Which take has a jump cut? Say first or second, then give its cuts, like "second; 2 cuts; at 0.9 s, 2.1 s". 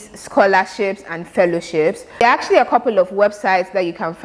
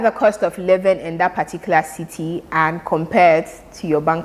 first; 1 cut; at 2.2 s